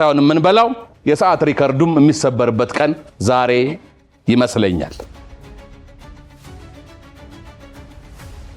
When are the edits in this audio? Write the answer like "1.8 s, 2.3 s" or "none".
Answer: none